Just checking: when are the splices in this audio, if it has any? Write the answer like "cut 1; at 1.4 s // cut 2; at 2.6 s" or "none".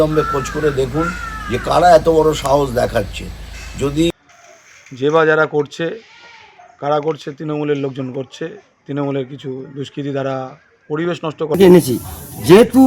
cut 1; at 4.1 s // cut 2; at 11.6 s

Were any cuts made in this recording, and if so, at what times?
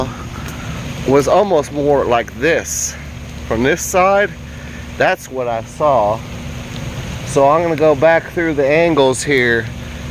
none

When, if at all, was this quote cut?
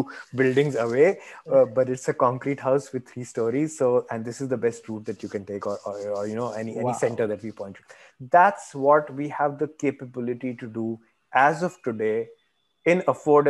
none

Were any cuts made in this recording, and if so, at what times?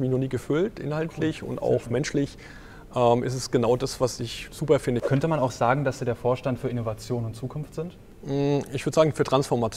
cut 1; at 5.0 s // cut 2; at 8.1 s

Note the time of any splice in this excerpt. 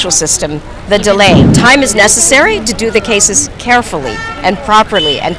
cut 1; at 1.6 s

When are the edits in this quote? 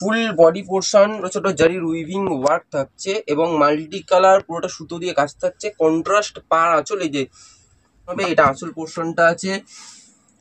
cut 1; at 1.2 s // cut 2; at 8.2 s

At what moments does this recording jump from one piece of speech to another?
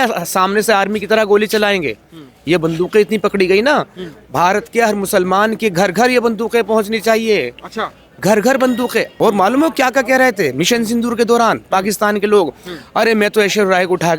cut 1; at 9.1 s

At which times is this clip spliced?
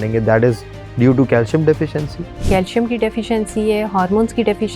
cut 1; at 2.5 s

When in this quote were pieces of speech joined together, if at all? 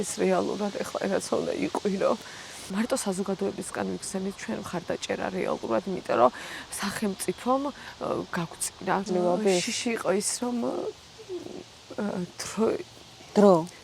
cut 1; at 2.7 s // cut 2; at 9.0 s

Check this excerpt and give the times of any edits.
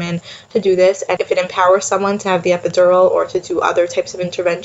cut 1; at 1.1 s

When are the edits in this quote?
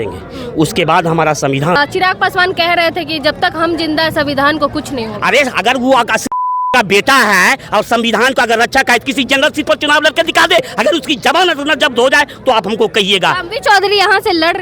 cut 1; at 1.8 s // cut 2; at 10.7 s

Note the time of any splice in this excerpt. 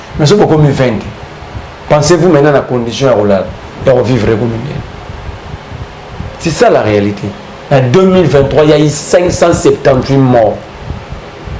cut 1; at 7.5 s

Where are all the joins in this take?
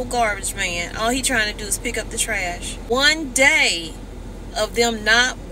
cut 1; at 2.8 s

